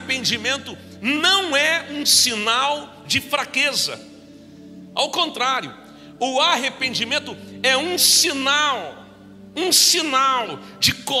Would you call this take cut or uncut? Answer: uncut